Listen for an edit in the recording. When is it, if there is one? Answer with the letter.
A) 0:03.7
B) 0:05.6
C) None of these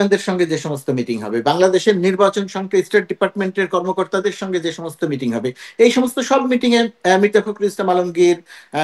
C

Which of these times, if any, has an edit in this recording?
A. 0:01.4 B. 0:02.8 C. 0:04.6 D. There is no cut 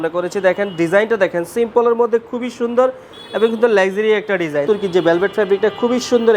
C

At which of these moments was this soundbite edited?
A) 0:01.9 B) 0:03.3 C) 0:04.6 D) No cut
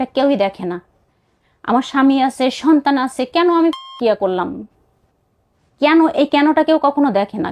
C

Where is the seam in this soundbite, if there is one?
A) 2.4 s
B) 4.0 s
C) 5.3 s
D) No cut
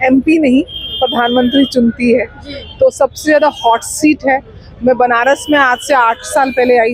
D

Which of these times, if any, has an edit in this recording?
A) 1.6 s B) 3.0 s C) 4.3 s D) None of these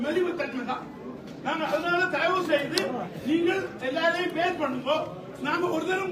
D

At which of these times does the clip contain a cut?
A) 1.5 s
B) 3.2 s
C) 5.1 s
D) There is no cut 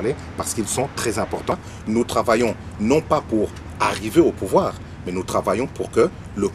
A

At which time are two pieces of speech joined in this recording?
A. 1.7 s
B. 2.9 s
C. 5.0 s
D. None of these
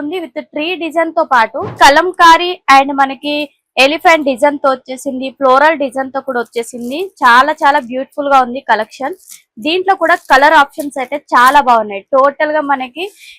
A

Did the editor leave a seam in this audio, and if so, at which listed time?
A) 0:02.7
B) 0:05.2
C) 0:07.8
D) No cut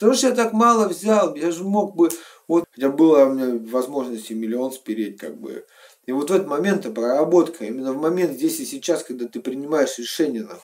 A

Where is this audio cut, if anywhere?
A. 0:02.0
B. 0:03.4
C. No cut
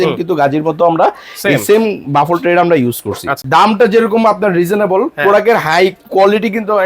B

